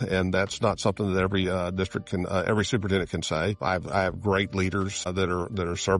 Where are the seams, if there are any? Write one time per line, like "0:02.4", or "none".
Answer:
0:03.6
0:05.1